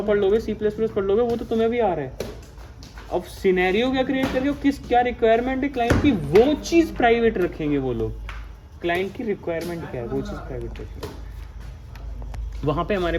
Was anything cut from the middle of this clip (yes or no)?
no